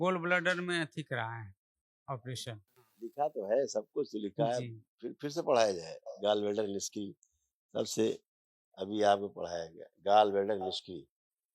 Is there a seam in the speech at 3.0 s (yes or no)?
yes